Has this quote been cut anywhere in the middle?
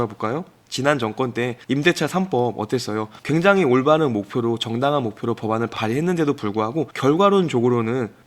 yes; 1 cut; at 6.9 s

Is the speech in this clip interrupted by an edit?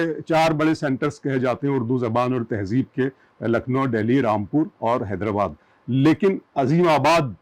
no; 0 cuts

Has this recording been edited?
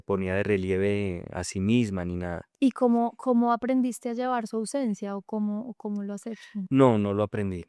no; 0 cuts

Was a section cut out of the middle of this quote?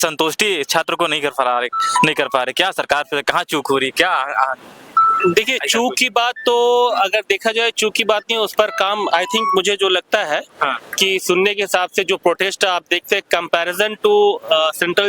no; 0 cuts

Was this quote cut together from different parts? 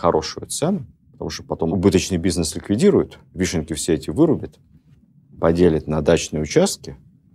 no; 0 cuts

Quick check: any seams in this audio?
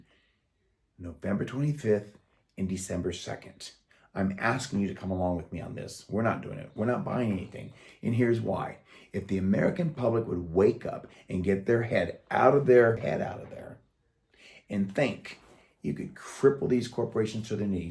yes; 1 cut; at 13.0 s

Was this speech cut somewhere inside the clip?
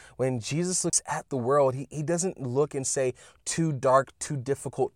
yes; 1 cut; at 1.0 s

